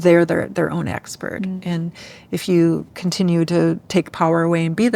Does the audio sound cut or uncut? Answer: uncut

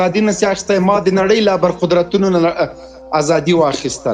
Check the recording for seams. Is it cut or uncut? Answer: uncut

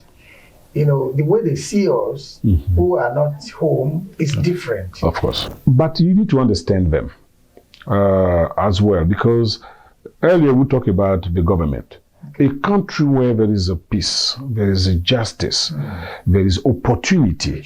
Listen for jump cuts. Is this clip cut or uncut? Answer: cut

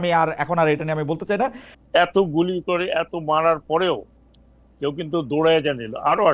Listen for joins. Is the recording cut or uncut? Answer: cut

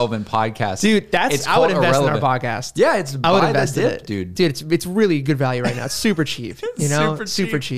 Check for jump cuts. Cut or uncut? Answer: uncut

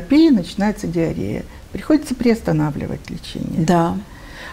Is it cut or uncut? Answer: uncut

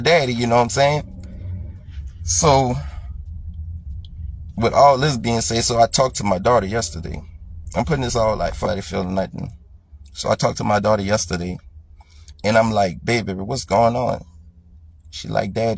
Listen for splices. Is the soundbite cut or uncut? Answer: cut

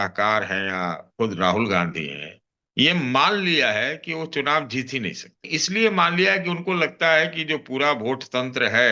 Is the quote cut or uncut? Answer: cut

